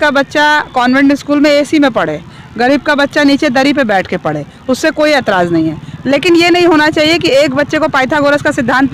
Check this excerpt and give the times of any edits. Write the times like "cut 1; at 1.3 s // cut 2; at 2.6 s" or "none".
none

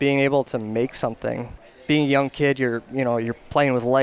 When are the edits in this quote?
none

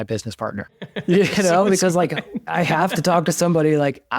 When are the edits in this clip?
cut 1; at 0.9 s // cut 2; at 2.5 s

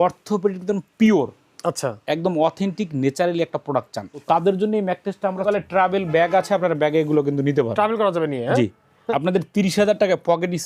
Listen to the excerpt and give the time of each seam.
cut 1; at 4.2 s // cut 2; at 5.4 s // cut 3; at 8.9 s

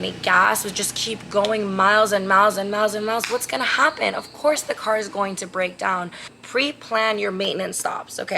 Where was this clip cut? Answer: cut 1; at 6.4 s

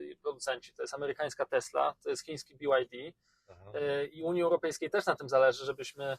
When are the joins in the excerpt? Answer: none

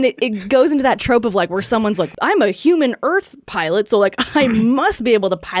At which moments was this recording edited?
cut 1; at 2.1 s

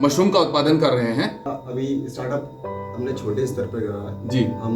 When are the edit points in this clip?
cut 1; at 1.4 s

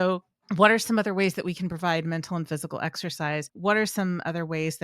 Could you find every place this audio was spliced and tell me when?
cut 1; at 3.5 s

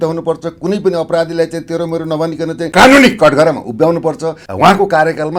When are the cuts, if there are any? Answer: cut 1; at 2.7 s // cut 2; at 4.4 s

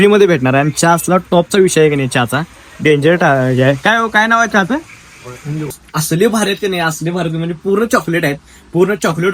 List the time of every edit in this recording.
cut 1; at 5.8 s

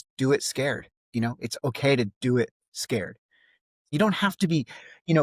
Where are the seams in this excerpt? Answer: cut 1; at 3.9 s

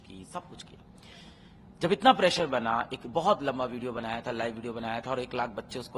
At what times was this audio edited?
none

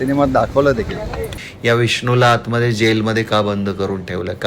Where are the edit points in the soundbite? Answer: cut 1; at 1.3 s

